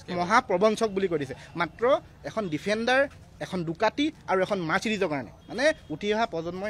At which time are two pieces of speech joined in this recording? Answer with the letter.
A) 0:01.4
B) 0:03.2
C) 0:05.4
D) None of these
C